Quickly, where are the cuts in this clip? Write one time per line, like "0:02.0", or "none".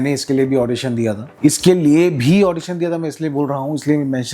0:01.2